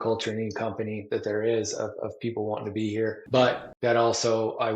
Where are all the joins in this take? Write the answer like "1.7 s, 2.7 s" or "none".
3.5 s